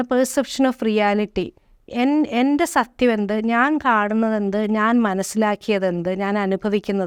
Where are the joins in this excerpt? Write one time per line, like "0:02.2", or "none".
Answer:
none